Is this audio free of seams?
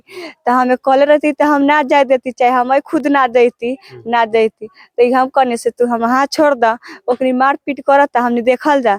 yes; 0 cuts

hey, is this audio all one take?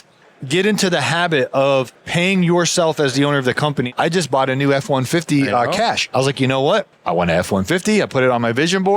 no; 3 cuts; at 2.0 s, 3.9 s, 6.0 s

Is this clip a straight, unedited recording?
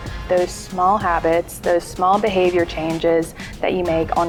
yes; 0 cuts

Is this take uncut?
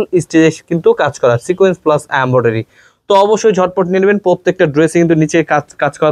yes; 0 cuts

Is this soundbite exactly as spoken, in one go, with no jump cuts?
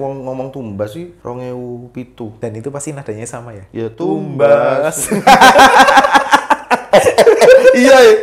no; 2 cuts; at 1.1 s, 2.3 s

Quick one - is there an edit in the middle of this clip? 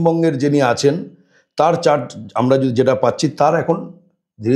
no; 0 cuts

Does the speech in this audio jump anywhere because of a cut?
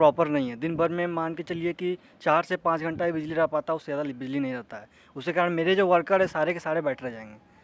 no; 0 cuts

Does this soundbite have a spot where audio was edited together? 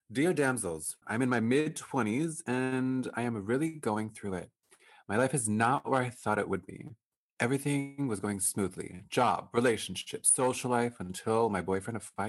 yes; 1 cut; at 1.0 s

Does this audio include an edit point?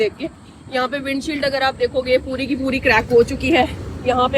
no; 0 cuts

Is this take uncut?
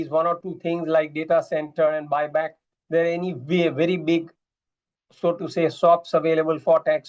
yes; 0 cuts

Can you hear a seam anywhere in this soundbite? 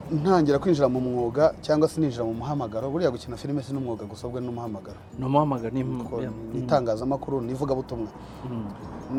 no; 0 cuts

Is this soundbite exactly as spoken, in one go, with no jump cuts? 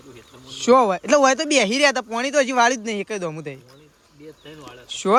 yes; 0 cuts

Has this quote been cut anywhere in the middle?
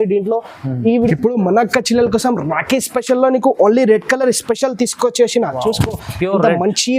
yes; 1 cut; at 1.1 s

